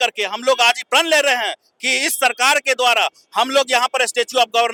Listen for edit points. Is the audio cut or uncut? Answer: uncut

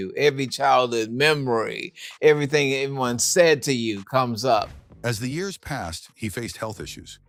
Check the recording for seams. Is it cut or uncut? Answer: uncut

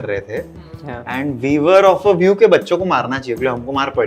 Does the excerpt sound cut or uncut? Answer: uncut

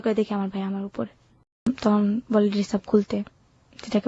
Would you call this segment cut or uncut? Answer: cut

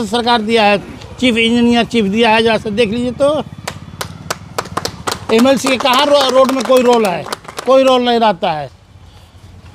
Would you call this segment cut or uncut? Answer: uncut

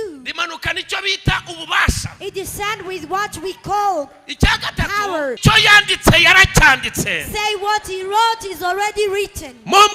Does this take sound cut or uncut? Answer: cut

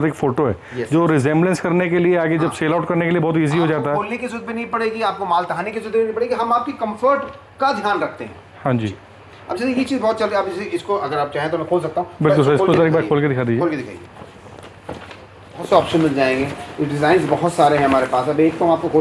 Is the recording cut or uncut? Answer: uncut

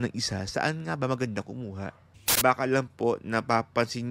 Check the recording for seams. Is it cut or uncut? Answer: cut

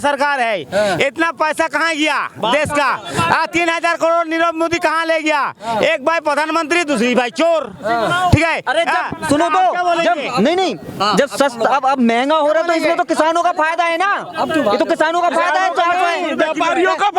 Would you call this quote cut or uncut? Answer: uncut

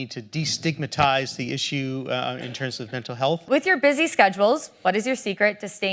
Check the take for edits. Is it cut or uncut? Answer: cut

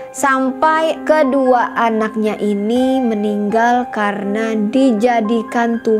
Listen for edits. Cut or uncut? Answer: cut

